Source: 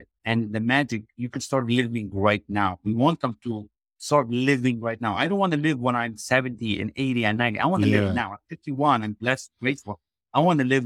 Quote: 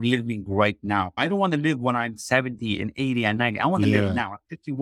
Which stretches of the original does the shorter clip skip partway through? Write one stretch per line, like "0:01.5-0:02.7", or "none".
0:02.8-0:05.1